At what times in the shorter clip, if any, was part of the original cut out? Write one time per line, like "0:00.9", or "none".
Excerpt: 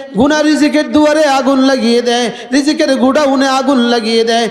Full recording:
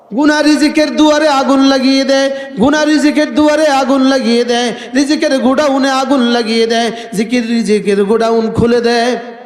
none